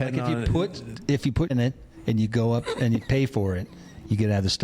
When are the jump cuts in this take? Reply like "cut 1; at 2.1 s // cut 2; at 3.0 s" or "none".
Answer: cut 1; at 1.5 s